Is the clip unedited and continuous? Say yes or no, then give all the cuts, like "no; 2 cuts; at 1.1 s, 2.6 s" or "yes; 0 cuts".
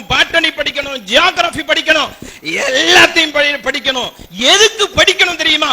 yes; 0 cuts